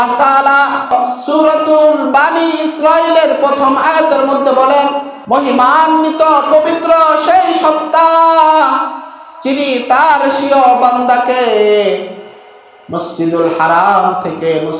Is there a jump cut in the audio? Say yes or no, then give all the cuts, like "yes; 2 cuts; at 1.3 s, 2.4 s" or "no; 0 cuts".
yes; 2 cuts; at 0.9 s, 5.1 s